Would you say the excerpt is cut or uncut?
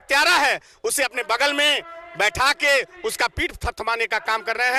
uncut